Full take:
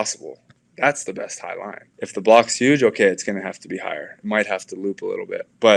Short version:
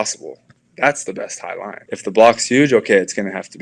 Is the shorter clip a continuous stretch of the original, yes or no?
no